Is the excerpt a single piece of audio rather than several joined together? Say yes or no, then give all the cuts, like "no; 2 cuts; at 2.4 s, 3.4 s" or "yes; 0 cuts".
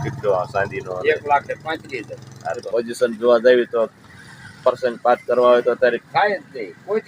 no; 1 cut; at 2.6 s